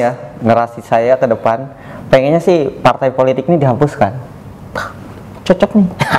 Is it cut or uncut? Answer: uncut